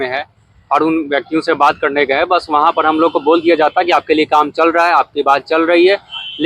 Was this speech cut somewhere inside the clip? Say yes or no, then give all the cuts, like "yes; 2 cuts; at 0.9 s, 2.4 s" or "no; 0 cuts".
no; 0 cuts